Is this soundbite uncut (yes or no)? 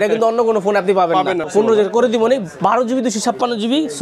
no